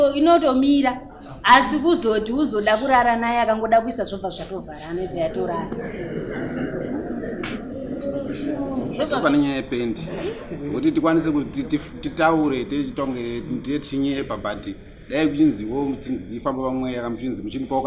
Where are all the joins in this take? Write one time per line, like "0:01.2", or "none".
0:09.2